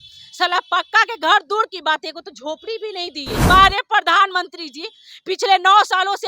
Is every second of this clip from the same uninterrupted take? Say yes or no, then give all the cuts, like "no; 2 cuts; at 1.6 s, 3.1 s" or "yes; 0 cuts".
no; 1 cut; at 3.4 s